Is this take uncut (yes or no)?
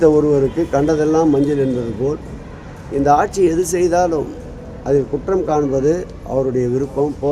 yes